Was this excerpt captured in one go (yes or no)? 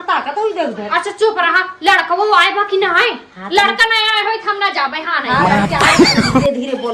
yes